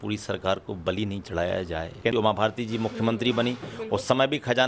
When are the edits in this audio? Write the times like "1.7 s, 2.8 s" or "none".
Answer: 2.0 s